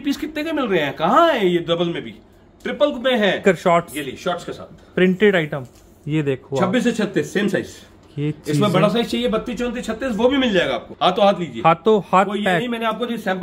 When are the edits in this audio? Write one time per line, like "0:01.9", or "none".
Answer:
0:03.4
0:10.9